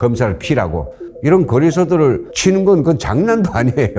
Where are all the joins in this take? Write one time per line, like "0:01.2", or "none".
0:01.0
0:02.3